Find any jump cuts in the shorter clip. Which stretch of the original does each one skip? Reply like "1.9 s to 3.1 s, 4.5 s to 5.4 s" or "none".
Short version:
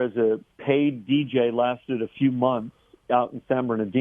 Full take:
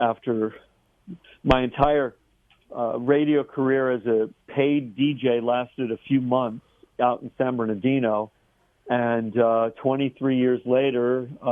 none

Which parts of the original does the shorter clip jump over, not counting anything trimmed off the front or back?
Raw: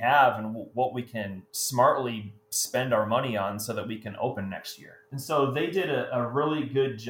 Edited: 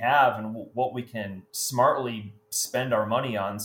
none

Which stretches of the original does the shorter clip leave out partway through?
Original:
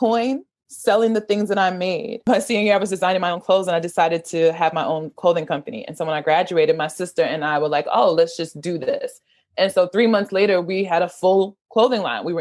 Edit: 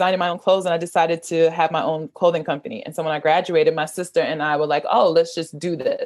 none

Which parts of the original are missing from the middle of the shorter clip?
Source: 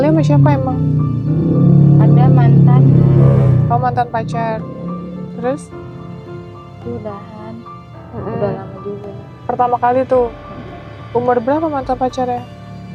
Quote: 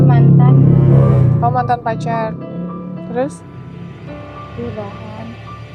none

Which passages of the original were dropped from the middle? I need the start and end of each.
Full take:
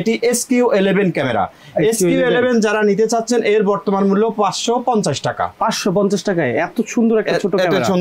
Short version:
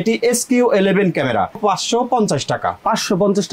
1.6 s to 4.3 s

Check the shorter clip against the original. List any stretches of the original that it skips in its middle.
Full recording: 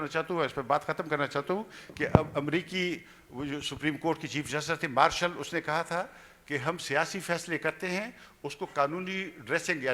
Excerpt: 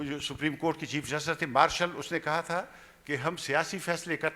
none

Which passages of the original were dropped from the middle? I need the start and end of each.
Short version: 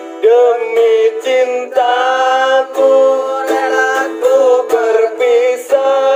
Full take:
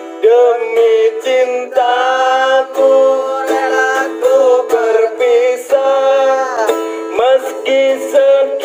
none

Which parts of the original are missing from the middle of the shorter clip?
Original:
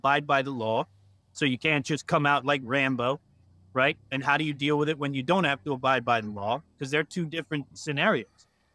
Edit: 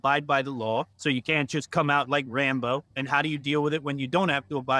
0.9 s to 1.3 s, 3.3 s to 4.1 s

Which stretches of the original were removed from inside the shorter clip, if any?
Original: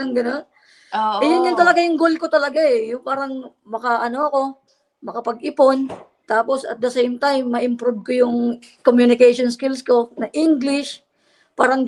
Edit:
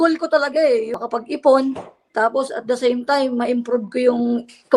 3.0 s to 5.1 s

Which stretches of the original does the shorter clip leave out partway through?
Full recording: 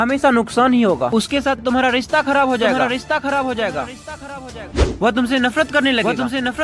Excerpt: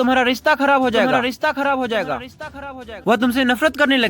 4.7 s to 4.9 s

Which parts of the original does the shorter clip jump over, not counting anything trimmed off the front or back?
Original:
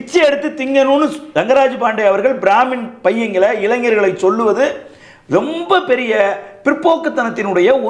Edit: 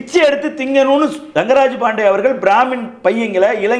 none

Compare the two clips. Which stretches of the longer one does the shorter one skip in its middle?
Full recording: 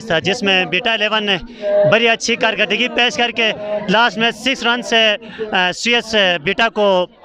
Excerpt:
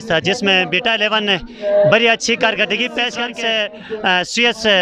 3.2 s to 4.7 s

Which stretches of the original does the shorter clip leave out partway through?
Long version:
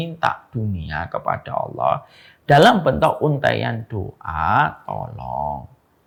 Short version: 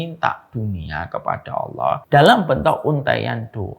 2.0 s to 2.4 s

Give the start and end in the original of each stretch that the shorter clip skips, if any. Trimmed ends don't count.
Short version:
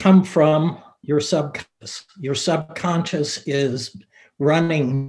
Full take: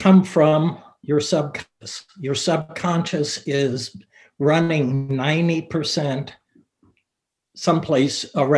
none

